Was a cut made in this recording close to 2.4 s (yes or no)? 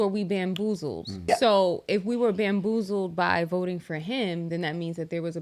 no